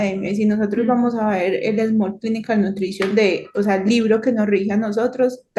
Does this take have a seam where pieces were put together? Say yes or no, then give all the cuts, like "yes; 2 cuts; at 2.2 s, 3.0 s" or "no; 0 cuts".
no; 0 cuts